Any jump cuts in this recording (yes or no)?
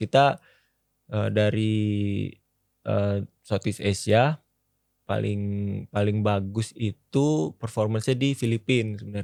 no